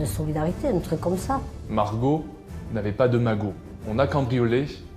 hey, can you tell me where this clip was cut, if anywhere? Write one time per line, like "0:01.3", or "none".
0:01.6
0:03.7